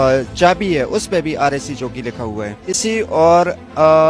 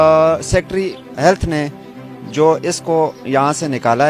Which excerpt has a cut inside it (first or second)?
first